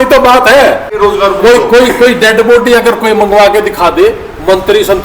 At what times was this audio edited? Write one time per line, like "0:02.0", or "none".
0:00.9